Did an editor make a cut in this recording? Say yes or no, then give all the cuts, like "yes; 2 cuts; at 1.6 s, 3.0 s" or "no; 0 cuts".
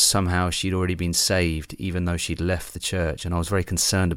no; 0 cuts